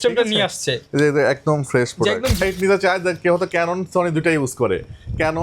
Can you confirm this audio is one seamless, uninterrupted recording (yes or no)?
no